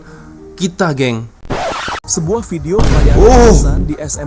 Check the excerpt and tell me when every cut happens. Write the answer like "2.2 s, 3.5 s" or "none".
1.5 s